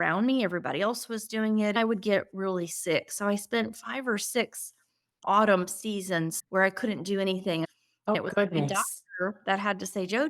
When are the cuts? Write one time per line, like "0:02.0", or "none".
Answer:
0:01.8
0:06.4
0:08.2